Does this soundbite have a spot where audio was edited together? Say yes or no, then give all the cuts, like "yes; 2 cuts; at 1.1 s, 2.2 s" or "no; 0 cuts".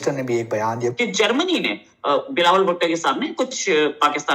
yes; 1 cut; at 0.9 s